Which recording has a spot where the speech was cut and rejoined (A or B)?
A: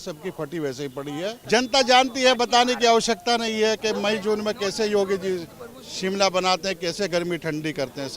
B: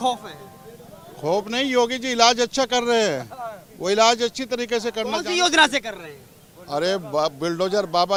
A